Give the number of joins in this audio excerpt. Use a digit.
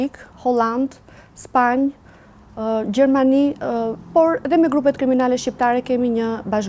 0